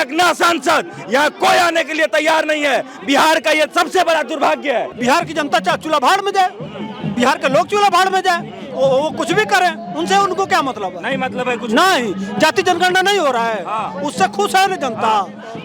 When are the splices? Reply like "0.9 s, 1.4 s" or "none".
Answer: 4.9 s

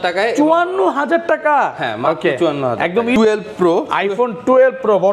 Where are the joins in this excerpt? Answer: 3.2 s

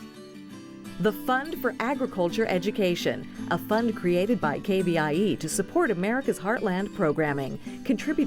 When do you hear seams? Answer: 1.0 s

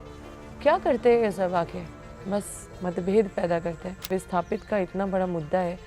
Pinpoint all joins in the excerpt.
4.1 s

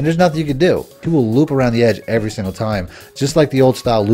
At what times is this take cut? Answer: 1.0 s

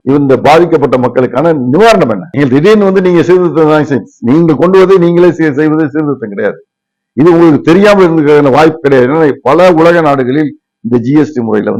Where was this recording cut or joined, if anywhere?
none

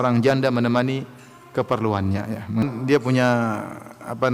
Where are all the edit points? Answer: 2.6 s

